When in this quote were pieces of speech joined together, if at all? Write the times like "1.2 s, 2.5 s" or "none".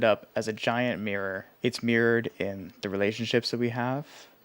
1.5 s